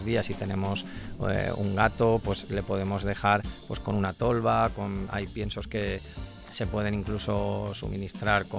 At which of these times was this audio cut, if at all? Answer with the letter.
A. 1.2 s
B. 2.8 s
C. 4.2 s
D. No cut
D